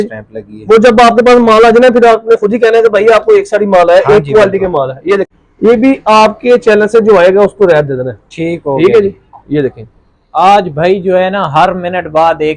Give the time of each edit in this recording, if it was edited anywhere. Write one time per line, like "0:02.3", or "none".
0:05.3